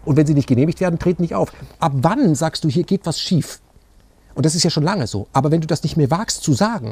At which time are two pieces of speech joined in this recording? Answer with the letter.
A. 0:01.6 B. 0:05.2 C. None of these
A